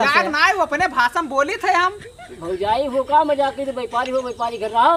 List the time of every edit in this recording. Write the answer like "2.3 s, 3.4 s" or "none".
none